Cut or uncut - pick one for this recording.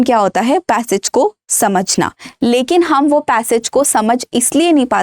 uncut